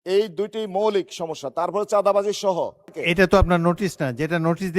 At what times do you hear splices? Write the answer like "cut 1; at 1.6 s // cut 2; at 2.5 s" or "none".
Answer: cut 1; at 2.9 s